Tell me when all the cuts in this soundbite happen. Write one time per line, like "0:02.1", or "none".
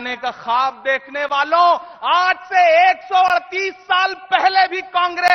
none

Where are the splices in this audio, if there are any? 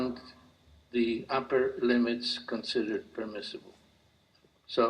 0:01.3

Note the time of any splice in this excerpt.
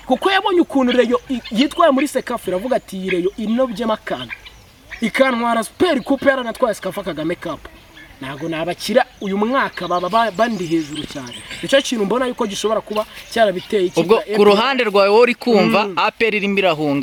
none

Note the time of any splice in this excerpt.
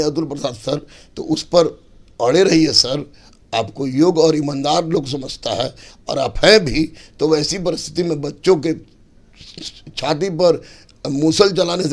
none

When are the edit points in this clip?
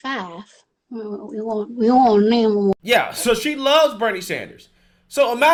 none

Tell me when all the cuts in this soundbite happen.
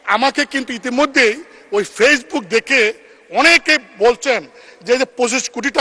none

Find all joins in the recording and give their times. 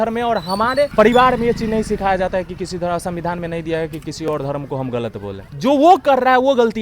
0:00.9
0:05.4

